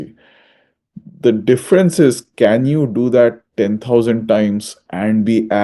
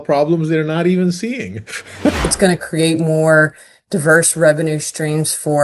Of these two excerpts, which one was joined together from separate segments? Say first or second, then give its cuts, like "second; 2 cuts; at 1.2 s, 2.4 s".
second; 1 cut; at 2.2 s